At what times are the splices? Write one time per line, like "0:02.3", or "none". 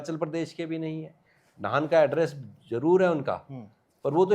none